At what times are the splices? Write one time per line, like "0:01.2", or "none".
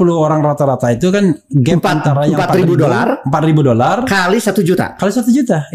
none